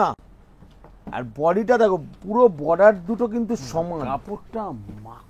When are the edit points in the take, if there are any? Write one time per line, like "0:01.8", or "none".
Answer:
0:04.1